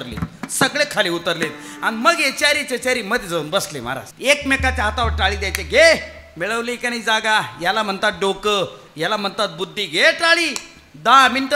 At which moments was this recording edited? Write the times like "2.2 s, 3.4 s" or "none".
4.1 s